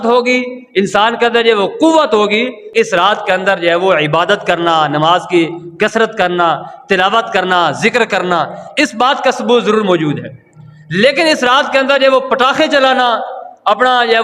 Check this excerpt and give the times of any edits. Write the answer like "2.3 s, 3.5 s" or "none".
2.6 s